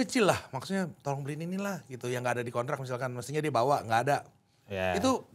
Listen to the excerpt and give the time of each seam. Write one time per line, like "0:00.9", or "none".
none

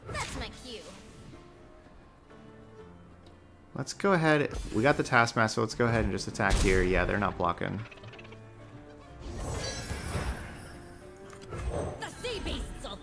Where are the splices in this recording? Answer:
none

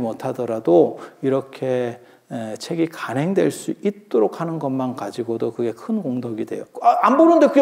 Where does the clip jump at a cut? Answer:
0:06.6

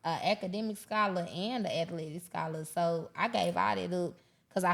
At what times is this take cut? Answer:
none

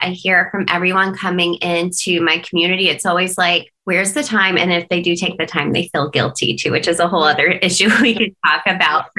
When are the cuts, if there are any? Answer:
0:03.7

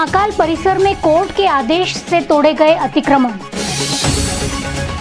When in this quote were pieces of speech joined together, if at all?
none

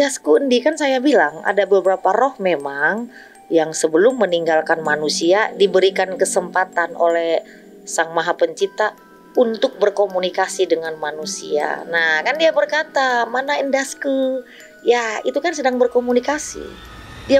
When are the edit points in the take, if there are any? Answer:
none

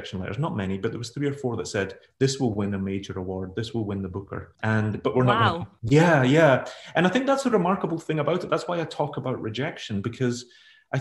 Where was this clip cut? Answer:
none

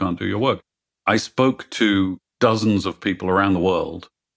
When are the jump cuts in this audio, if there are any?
none

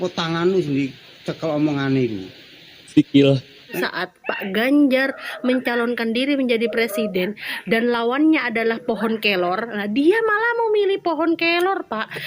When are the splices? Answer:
0:03.8

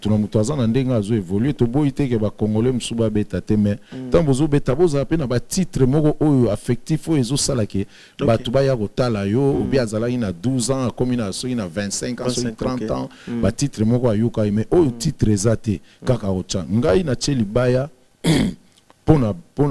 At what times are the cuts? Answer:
none

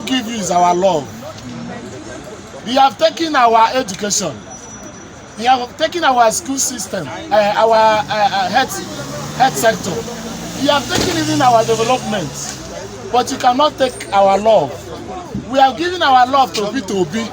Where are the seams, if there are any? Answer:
0:02.6

